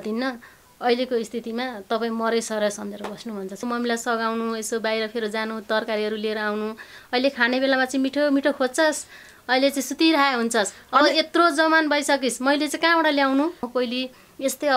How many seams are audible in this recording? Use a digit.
2